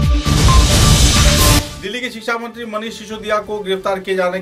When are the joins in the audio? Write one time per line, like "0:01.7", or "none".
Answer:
0:01.7